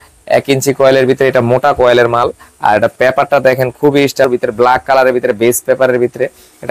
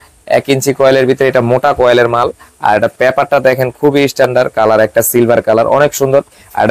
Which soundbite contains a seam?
first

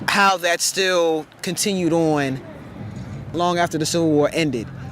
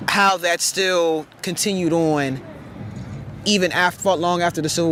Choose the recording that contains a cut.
first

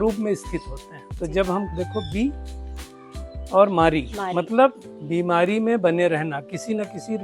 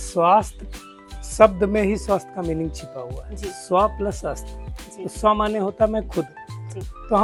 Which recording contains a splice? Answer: first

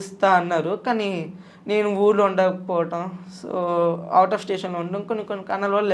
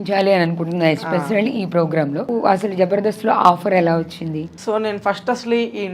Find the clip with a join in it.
second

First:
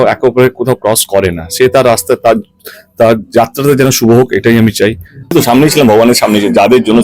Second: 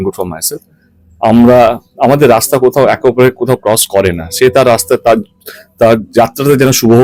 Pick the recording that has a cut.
first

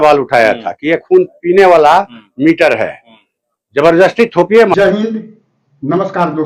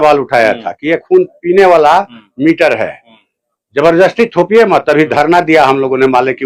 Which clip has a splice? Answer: second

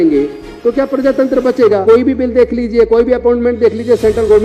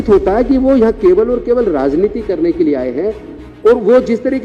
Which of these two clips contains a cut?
first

